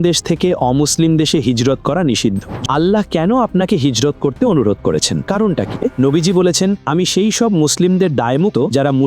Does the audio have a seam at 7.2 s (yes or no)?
no